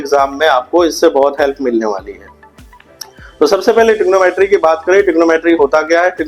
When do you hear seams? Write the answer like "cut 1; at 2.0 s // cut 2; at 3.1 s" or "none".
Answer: none